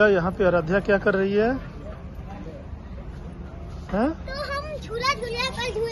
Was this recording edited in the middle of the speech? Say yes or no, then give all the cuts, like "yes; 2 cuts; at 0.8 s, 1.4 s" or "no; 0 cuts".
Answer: no; 0 cuts